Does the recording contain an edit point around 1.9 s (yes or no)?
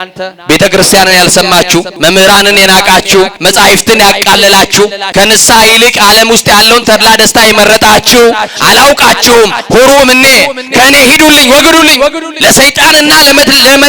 yes